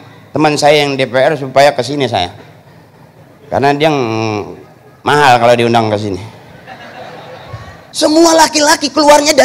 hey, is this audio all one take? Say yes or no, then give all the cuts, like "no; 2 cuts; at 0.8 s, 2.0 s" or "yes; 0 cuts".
no; 1 cut; at 7.9 s